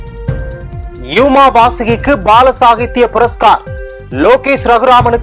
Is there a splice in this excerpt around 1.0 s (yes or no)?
yes